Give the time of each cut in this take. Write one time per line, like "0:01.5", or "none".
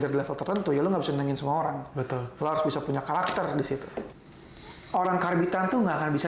0:04.0